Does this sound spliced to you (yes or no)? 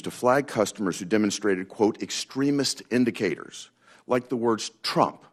no